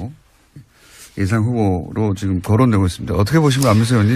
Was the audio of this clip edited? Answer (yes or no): yes